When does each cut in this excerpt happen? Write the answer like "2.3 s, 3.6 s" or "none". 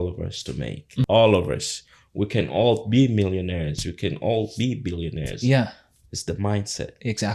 1.1 s